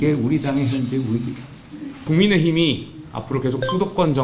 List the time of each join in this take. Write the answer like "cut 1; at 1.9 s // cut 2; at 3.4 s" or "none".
cut 1; at 2.0 s